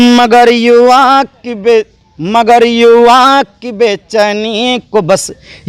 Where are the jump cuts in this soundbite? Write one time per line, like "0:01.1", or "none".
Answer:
none